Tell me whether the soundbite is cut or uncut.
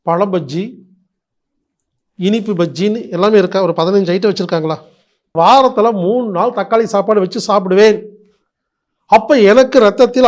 cut